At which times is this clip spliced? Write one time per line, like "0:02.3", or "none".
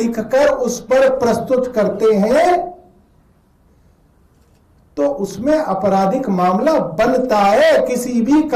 none